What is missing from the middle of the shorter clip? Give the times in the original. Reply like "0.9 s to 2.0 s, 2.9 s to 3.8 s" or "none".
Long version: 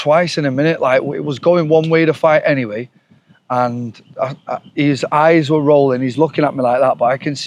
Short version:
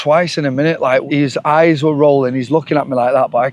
1.1 s to 4.7 s